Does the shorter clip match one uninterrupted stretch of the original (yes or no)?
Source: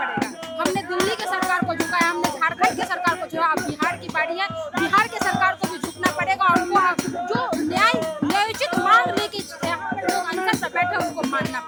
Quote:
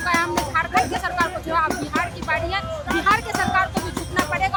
yes